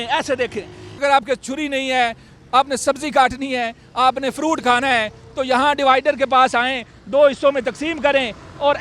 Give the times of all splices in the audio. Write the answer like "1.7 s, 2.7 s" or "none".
1.0 s